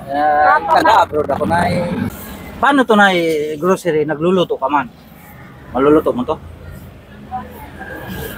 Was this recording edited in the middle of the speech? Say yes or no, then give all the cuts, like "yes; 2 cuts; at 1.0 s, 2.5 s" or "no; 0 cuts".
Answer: yes; 1 cut; at 2.1 s